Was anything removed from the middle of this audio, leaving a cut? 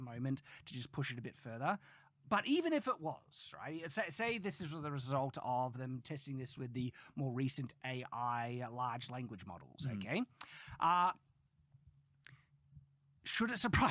no; 0 cuts

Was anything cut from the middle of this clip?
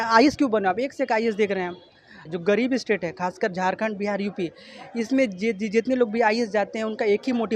yes; 1 cut; at 2.3 s

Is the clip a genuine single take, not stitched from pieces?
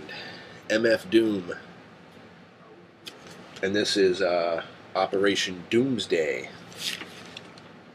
yes; 0 cuts

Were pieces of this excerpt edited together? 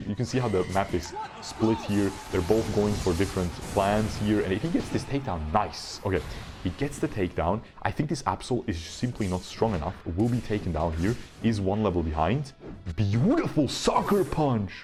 no; 0 cuts

